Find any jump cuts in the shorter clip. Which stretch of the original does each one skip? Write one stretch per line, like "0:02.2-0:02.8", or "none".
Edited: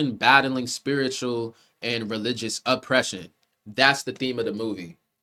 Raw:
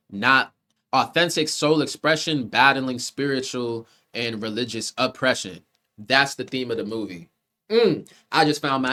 none

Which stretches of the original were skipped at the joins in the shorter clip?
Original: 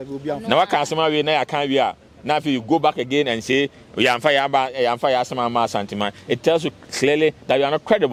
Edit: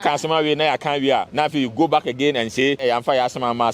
0:02.0-0:02.2
0:03.7-0:04.7

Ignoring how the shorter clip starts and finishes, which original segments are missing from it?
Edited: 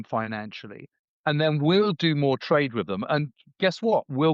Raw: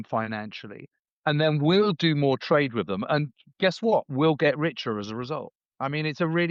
none

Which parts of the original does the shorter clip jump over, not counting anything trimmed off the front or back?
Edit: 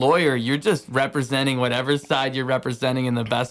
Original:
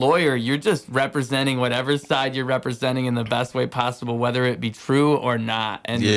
none

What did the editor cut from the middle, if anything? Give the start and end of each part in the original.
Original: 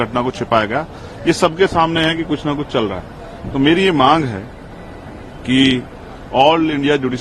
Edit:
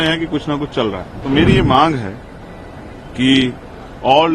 0:03.1-0:03.4

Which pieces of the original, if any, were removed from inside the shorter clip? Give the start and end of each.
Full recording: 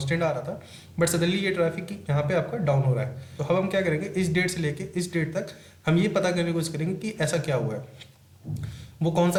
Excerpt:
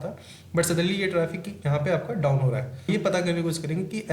0:03.3-0:06.0

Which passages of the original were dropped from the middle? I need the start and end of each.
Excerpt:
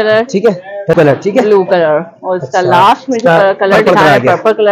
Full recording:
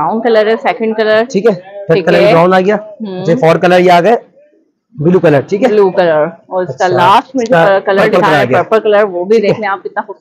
0:02.0-0:05.2

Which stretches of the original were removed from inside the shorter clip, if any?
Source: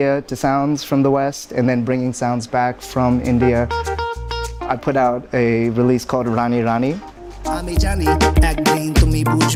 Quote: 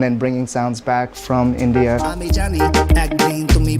0:03.7-0:07.5

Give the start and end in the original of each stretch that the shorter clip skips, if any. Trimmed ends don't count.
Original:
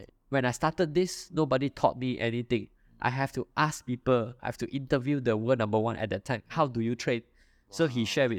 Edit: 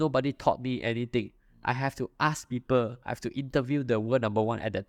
none

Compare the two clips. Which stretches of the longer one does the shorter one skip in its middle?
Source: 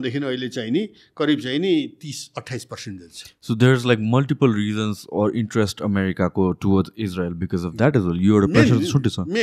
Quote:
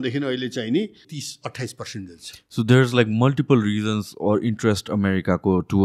0:01.0-0:02.0

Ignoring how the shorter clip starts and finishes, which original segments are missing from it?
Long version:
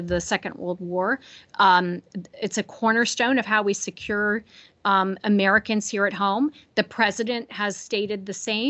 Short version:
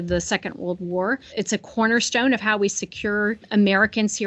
0:01.3-0:02.4
0:04.5-0:05.2

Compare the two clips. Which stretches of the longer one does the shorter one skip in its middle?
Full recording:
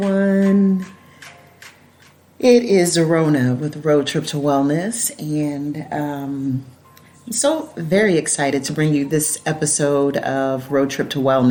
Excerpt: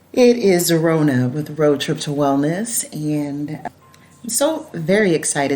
0:05.9-0:06.7

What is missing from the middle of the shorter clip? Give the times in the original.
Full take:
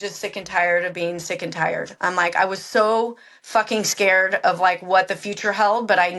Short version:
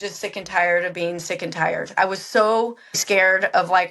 0:01.9-0:02.3
0:03.4-0:03.9

